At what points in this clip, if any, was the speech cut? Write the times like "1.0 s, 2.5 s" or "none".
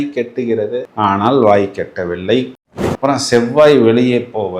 2.6 s